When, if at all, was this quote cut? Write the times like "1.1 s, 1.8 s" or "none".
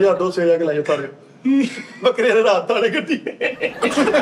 none